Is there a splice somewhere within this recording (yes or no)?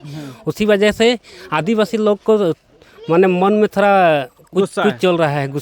no